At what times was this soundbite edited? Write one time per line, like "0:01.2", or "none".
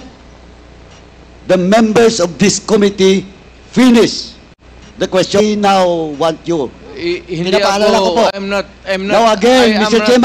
0:05.4